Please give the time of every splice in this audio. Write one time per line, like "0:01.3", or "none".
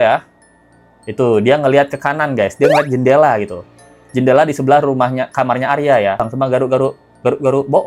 0:06.3